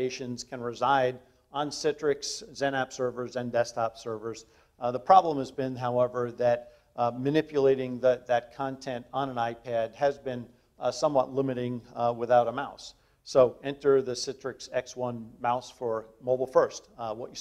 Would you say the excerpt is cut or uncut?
uncut